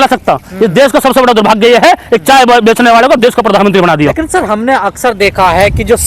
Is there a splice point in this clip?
no; 0 cuts

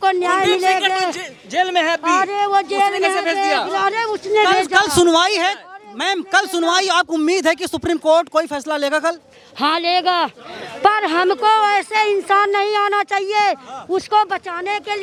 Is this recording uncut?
yes; 0 cuts

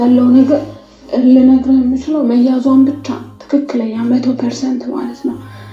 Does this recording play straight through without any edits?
yes; 0 cuts

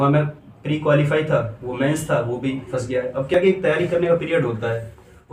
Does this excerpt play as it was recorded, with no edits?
yes; 0 cuts

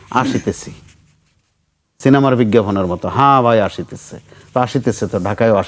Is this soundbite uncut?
yes; 0 cuts

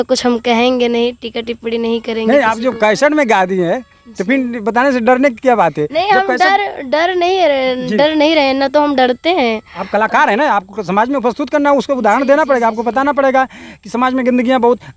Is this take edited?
no; 0 cuts

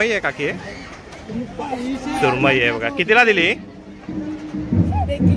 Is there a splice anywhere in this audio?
no; 0 cuts

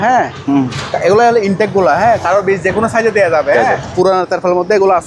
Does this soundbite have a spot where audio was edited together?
yes; 2 cuts; at 2.4 s, 3.9 s

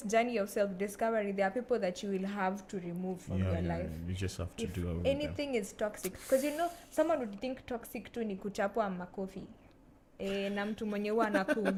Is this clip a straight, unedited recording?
yes; 0 cuts

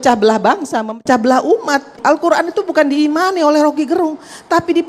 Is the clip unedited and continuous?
no; 1 cut; at 2.0 s

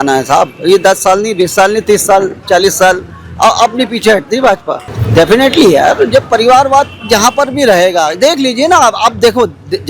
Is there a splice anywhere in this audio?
yes; 1 cut; at 4.9 s

